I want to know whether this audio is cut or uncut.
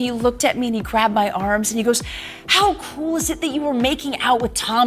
uncut